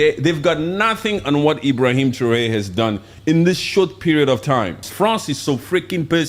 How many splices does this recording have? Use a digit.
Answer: 1